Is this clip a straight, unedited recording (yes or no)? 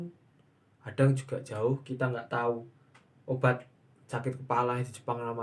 yes